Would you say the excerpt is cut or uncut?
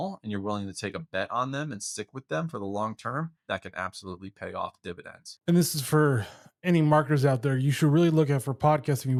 uncut